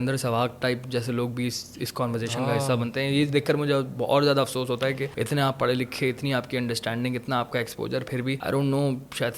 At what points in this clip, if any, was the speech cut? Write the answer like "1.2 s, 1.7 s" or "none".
5.1 s, 8.4 s